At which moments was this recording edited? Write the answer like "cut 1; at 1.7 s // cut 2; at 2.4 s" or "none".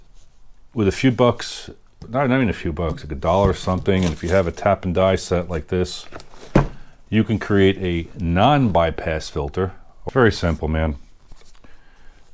cut 1; at 9.9 s